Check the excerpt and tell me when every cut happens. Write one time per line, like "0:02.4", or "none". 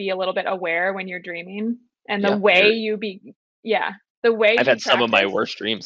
none